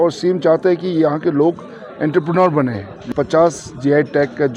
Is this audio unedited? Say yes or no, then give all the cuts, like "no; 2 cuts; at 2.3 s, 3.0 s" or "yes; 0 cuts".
no; 1 cut; at 3.1 s